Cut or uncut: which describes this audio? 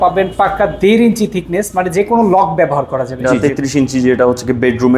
cut